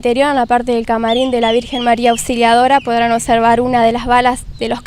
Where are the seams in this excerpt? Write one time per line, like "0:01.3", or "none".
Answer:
none